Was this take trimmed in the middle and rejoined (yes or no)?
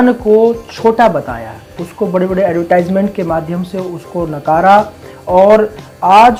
no